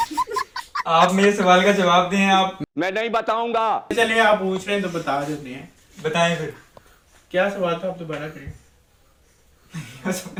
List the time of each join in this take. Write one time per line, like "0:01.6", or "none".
none